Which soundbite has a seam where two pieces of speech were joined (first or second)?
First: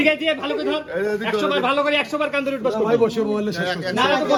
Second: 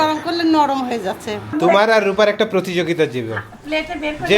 second